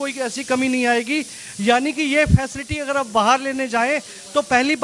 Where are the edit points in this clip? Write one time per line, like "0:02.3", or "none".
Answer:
none